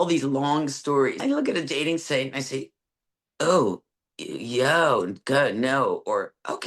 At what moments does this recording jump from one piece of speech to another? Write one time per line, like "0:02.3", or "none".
0:01.2